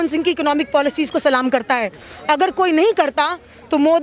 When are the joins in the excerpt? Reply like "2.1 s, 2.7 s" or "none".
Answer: none